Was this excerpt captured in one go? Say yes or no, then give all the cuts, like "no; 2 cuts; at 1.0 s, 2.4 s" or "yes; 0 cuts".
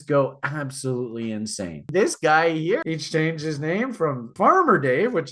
no; 3 cuts; at 1.9 s, 2.8 s, 4.3 s